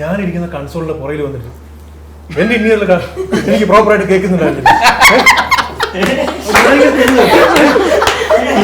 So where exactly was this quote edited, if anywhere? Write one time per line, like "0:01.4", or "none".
none